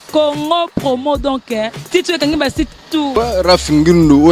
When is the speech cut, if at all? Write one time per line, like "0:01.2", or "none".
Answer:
0:03.1